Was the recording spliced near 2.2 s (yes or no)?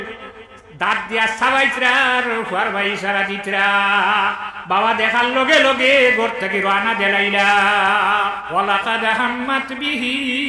no